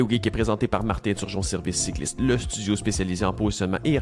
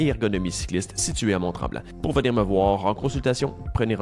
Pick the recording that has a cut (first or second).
second